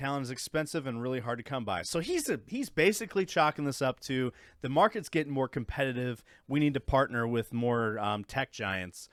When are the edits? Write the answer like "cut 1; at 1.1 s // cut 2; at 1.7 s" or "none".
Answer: none